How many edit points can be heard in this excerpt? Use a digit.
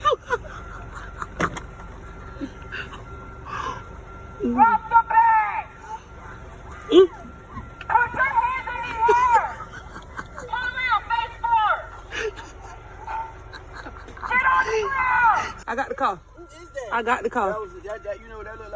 1